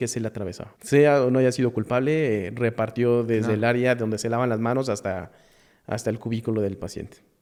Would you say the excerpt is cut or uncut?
uncut